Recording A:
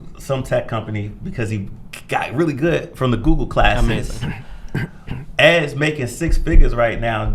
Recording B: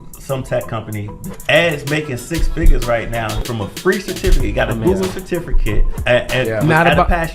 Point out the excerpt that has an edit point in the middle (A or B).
B